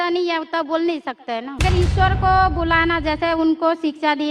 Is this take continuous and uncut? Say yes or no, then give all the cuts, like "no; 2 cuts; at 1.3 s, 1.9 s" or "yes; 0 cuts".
no; 1 cut; at 1.6 s